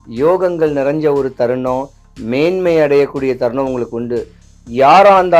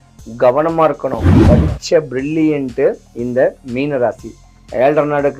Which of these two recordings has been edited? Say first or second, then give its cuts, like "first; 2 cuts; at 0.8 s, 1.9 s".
second; 2 cuts; at 1.3 s, 3.1 s